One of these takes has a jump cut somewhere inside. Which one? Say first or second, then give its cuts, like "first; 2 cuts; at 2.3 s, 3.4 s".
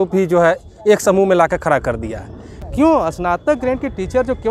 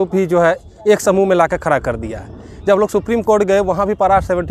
first; 1 cut; at 2.6 s